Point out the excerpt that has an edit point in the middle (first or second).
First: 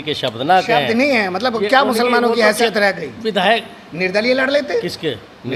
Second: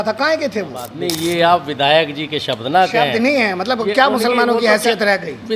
second